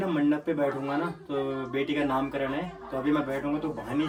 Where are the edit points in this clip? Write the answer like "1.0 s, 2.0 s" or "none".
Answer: none